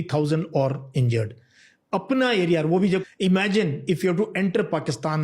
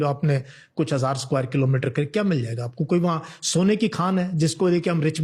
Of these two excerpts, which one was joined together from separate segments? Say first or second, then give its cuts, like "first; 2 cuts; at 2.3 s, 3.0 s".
first; 1 cut; at 3.0 s